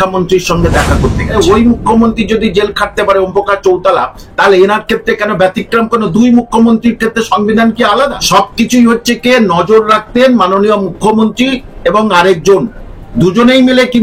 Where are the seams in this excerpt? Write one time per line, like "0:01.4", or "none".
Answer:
0:01.3
0:08.2